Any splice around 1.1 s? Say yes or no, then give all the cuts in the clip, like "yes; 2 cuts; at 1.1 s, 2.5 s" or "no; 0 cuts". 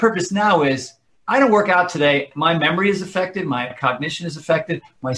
no; 2 cuts; at 2.3 s, 3.7 s